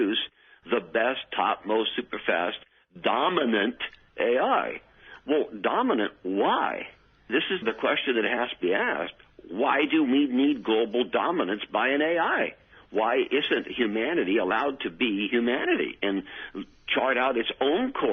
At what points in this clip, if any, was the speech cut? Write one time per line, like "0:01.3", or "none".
none